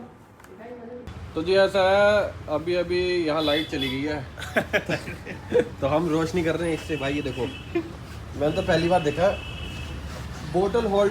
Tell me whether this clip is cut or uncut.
cut